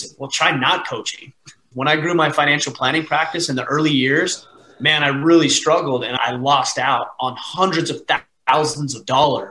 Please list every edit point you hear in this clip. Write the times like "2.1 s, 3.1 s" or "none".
1.7 s, 6.2 s